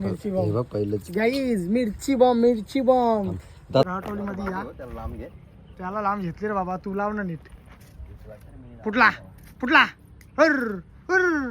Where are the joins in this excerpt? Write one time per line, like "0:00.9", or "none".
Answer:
0:03.9